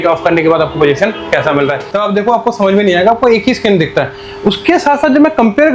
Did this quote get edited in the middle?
yes; 1 cut; at 1.8 s

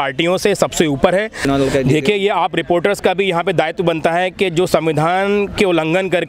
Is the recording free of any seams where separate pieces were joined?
no; 1 cut; at 1.4 s

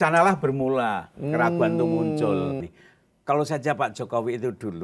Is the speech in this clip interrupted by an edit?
yes; 1 cut; at 2.6 s

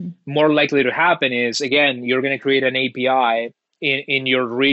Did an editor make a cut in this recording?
no; 0 cuts

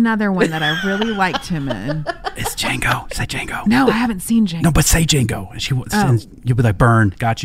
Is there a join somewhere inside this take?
yes; 2 cuts; at 3.6 s, 4.5 s

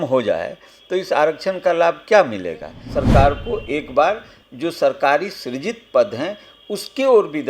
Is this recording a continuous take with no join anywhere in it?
no; 1 cut; at 2.8 s

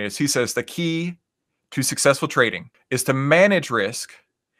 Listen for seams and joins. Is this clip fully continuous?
no; 1 cut; at 2.7 s

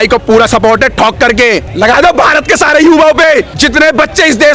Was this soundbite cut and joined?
yes; 2 cuts; at 1.7 s, 3.5 s

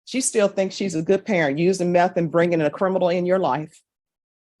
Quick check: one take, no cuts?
yes; 0 cuts

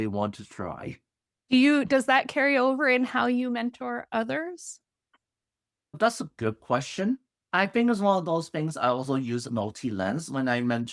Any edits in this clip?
no; 0 cuts

